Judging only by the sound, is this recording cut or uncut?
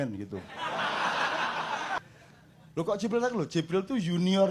cut